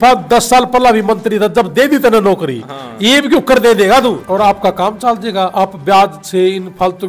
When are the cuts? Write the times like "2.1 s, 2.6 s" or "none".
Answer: 4.2 s